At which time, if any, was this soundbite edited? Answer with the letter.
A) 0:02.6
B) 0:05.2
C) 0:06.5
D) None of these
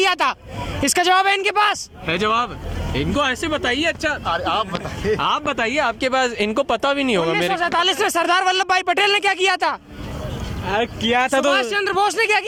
D